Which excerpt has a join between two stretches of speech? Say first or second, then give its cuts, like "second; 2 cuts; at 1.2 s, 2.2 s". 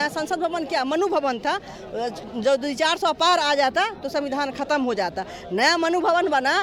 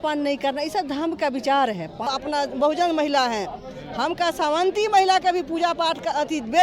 second; 1 cut; at 2.1 s